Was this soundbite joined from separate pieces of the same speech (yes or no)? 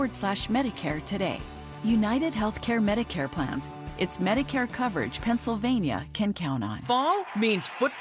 yes